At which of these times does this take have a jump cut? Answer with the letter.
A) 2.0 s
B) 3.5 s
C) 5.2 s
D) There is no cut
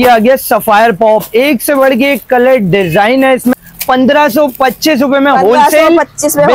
B